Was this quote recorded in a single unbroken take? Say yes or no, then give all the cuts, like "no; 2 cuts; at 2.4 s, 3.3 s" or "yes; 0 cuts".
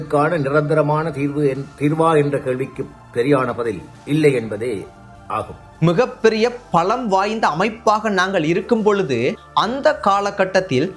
no; 1 cut; at 5.7 s